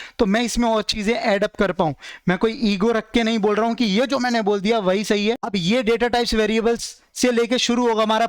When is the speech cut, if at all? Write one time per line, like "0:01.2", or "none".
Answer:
0:05.5